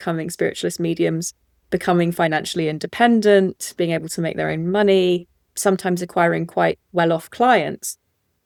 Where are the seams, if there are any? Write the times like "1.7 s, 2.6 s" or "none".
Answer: none